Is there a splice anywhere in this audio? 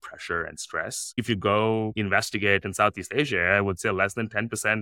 yes; 2 cuts; at 1.1 s, 1.9 s

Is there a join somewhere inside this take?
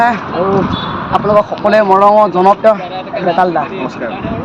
no; 0 cuts

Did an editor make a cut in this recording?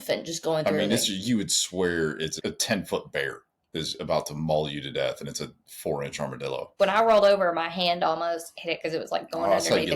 yes; 2 cuts; at 2.4 s, 6.7 s

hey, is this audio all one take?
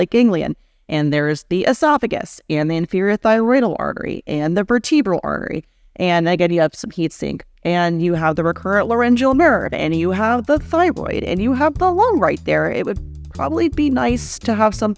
yes; 0 cuts

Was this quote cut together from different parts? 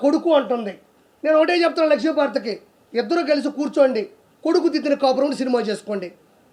no; 0 cuts

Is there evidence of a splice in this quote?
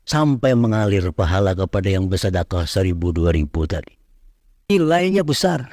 yes; 1 cut; at 4.7 s

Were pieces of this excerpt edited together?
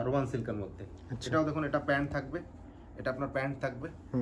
no; 0 cuts

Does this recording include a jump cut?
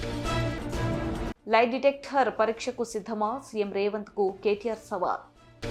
no; 0 cuts

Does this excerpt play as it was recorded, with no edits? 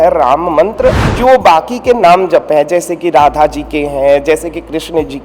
no; 1 cut; at 1.1 s

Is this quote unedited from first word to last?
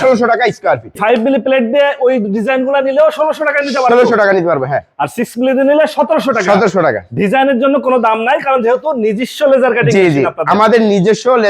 no; 1 cut; at 1.0 s

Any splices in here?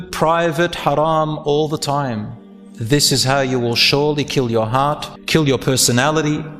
yes; 1 cut; at 5.1 s

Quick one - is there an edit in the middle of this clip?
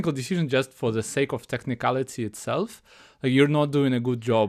no; 0 cuts

